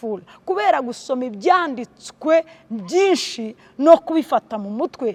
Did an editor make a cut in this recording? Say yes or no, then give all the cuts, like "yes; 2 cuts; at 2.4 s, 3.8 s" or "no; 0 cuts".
no; 0 cuts